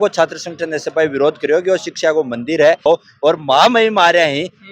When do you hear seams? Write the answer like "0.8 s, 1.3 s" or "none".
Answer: 2.8 s